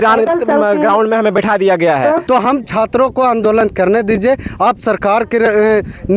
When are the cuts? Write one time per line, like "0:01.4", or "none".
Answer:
0:02.2